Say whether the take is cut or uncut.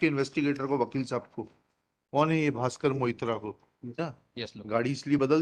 cut